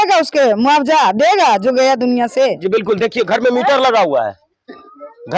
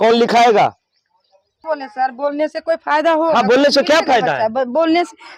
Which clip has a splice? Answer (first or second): second